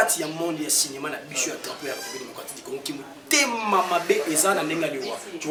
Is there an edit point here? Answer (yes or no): no